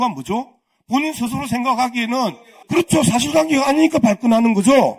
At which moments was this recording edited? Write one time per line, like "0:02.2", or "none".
0:02.5